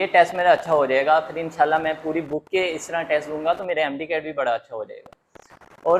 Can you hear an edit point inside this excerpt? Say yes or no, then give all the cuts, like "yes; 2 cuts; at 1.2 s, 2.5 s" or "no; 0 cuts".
no; 0 cuts